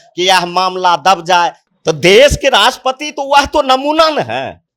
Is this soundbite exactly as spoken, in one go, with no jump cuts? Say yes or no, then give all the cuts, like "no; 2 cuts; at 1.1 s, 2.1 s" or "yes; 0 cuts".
no; 1 cut; at 1.6 s